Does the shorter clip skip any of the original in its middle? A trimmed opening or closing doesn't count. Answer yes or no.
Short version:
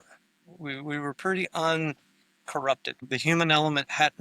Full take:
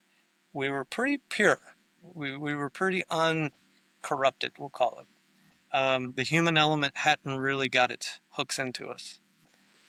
yes